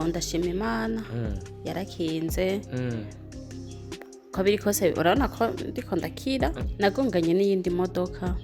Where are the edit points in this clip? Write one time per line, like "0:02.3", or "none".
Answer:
0:06.6